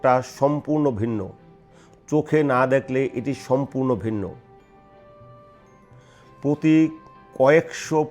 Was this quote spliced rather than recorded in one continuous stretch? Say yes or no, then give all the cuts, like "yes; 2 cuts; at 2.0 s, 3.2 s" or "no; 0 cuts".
yes; 2 cuts; at 4.4 s, 5.7 s